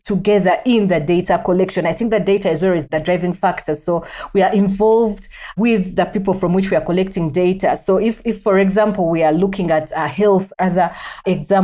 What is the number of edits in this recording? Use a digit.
0